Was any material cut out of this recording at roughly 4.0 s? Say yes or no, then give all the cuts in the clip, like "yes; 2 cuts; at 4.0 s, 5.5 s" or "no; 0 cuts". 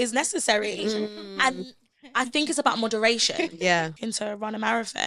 yes; 1 cut; at 4.0 s